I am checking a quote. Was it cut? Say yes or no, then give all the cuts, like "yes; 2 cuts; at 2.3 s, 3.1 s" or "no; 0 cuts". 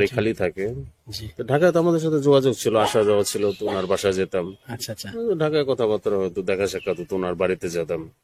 no; 0 cuts